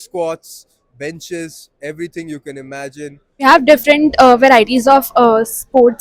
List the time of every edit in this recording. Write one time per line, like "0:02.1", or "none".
0:03.4